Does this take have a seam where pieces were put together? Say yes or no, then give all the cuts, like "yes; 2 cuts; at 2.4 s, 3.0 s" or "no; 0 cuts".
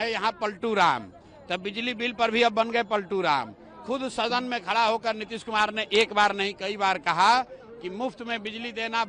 no; 0 cuts